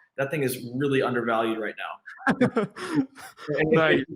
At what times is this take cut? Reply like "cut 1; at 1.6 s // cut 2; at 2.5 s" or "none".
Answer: none